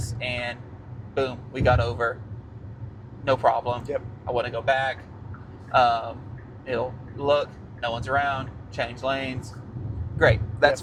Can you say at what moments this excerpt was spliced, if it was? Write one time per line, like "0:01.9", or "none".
none